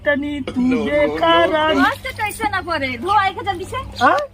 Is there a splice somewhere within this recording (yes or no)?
yes